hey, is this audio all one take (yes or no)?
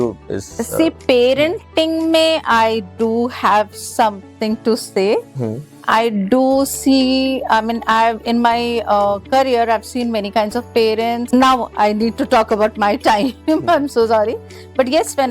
no